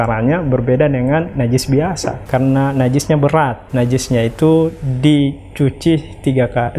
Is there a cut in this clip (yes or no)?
yes